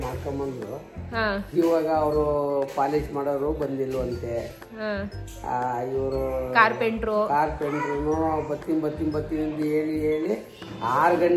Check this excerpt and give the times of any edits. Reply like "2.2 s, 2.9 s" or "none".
none